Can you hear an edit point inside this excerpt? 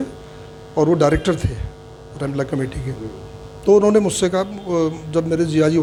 no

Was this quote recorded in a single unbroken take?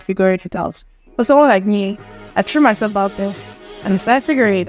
yes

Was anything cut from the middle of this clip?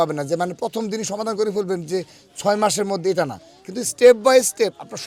no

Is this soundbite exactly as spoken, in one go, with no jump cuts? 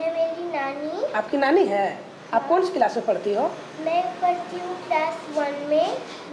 yes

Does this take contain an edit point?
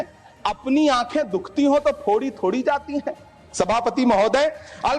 no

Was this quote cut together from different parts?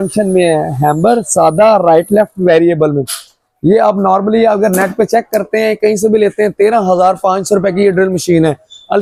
no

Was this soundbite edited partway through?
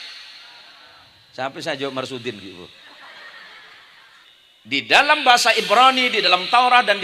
yes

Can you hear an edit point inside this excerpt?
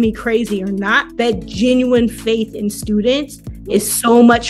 yes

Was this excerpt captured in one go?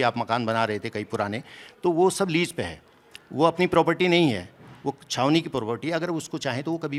yes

